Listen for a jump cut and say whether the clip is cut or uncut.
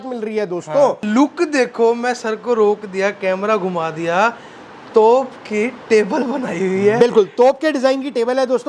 cut